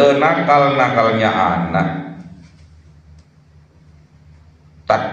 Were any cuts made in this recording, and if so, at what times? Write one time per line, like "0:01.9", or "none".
none